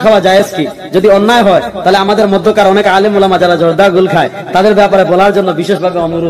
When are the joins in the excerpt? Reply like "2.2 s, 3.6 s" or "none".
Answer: none